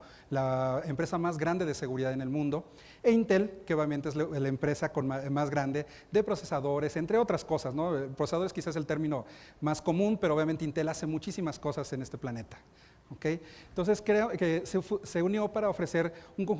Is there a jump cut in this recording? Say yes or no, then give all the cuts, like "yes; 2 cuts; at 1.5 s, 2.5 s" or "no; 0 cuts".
no; 0 cuts